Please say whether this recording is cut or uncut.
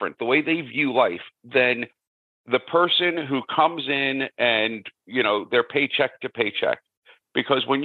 uncut